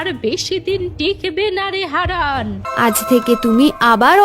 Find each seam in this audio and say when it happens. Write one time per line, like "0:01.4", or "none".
0:02.7